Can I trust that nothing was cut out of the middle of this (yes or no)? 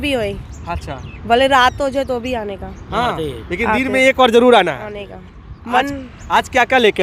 yes